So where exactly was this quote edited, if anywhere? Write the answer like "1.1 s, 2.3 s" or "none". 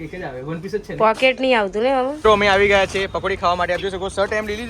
2.1 s